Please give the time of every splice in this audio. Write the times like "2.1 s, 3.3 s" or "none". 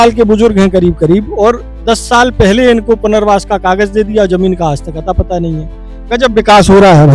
none